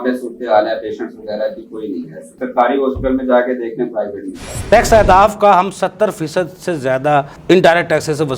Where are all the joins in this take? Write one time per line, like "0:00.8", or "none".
0:04.6